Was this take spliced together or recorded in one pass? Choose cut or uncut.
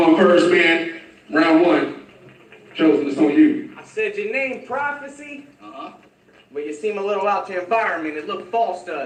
uncut